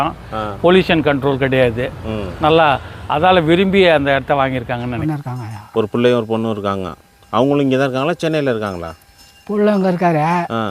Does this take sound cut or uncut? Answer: cut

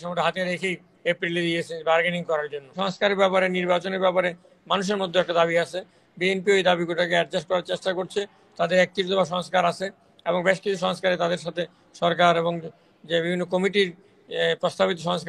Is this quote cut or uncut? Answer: cut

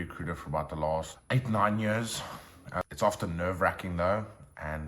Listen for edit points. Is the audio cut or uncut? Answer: cut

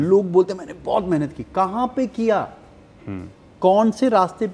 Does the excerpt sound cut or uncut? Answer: uncut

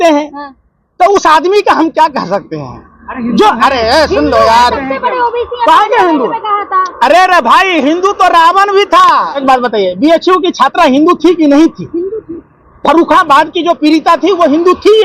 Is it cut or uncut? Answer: cut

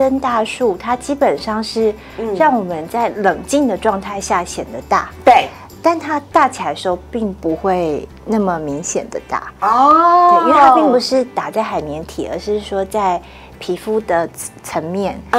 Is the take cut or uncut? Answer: uncut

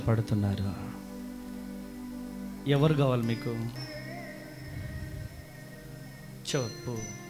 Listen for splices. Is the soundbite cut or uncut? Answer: uncut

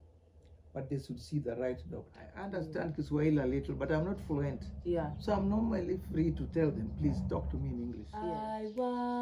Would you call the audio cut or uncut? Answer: cut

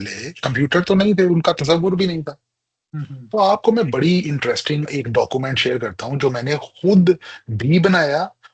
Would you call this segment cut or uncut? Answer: uncut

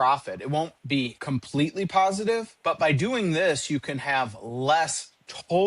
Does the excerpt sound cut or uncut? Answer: cut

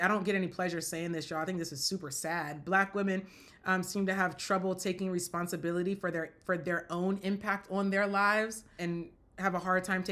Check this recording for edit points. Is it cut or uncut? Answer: uncut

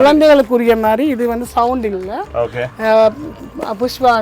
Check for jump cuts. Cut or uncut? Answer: uncut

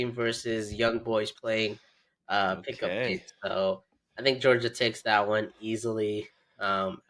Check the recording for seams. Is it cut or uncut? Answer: uncut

